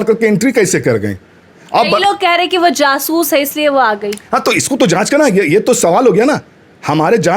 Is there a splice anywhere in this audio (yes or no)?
no